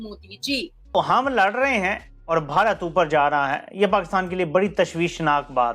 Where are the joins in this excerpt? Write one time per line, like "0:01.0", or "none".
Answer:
0:01.0